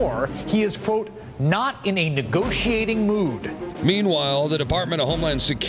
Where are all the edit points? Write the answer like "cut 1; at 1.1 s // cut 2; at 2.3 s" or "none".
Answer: cut 1; at 2.0 s

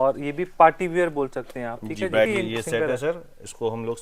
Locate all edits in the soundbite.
cut 1; at 2.3 s

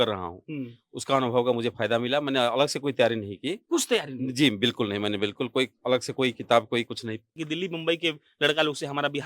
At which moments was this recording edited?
cut 1; at 7.4 s

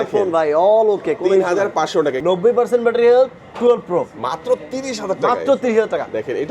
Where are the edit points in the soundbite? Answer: cut 1; at 2.2 s

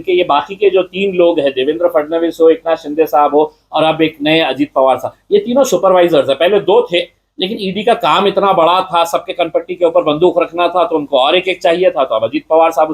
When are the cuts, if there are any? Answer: none

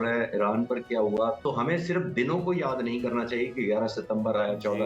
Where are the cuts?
cut 1; at 1.4 s

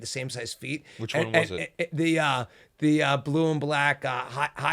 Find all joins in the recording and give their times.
none

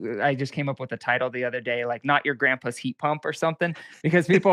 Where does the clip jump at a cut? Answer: none

